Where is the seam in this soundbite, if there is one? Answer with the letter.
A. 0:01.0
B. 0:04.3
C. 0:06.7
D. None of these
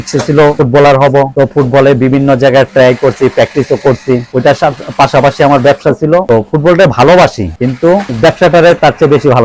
B